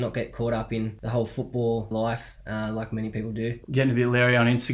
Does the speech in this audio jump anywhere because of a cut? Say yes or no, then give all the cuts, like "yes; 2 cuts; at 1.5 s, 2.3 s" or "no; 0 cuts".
yes; 3 cuts; at 1.0 s, 1.9 s, 3.6 s